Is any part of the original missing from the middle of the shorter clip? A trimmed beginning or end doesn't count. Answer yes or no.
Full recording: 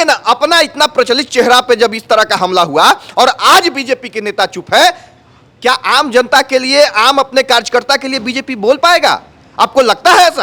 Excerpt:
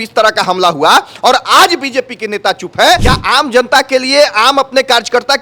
yes